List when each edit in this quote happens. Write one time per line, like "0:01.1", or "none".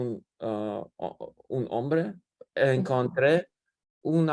none